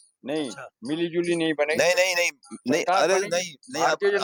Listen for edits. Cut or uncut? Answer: uncut